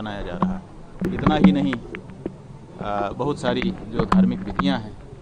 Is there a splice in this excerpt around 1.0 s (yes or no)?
yes